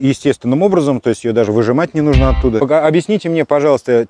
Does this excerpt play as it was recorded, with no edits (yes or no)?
no